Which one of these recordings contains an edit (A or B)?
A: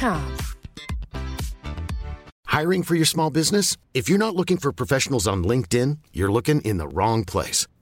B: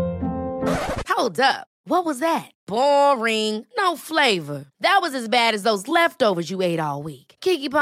A